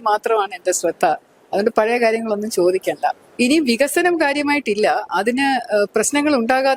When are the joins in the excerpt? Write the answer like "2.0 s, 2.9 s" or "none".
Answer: 3.2 s